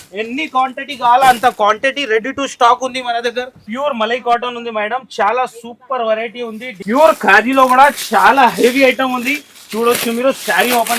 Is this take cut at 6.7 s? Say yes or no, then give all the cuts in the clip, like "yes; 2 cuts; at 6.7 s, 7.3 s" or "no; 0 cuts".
yes; 2 cuts; at 3.7 s, 6.7 s